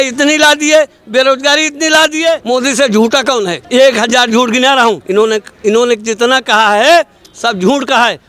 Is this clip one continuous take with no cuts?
no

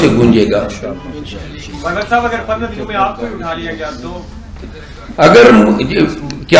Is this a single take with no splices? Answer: yes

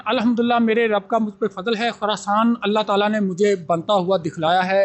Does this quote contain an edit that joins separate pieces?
no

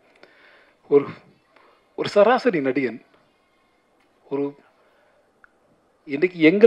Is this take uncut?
yes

